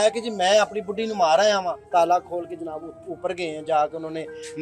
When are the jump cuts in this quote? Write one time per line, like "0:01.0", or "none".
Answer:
0:01.8